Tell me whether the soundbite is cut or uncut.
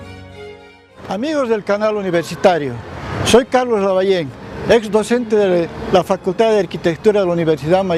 uncut